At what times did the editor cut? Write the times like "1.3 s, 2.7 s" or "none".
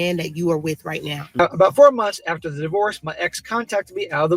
1.4 s